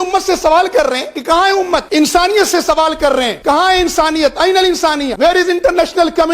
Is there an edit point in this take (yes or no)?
yes